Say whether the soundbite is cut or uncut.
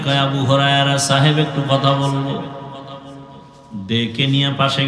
uncut